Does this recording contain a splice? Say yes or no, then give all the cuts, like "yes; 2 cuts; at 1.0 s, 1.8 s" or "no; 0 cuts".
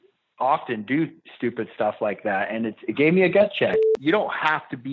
yes; 1 cut; at 3.8 s